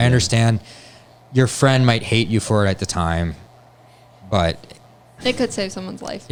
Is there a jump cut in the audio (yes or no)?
no